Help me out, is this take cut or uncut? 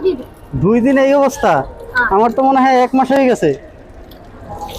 uncut